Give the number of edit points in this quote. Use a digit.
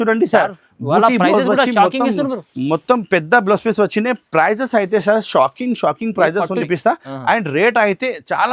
1